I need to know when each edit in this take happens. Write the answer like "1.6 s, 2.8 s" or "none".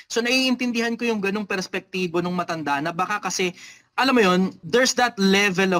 4.6 s